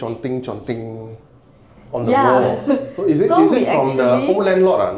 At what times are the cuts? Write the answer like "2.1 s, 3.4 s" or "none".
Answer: none